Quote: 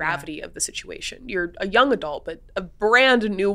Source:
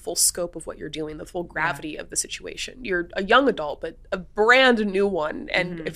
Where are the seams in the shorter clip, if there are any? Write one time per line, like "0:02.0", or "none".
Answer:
none